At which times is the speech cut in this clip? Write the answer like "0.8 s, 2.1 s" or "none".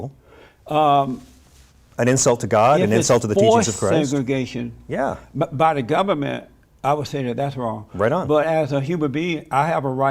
none